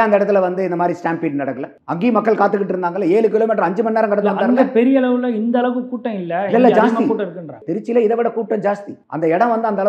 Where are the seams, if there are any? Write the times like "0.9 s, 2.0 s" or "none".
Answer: none